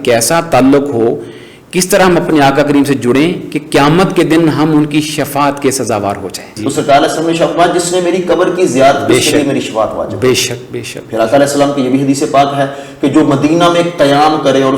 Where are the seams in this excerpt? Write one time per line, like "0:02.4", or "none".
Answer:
0:06.6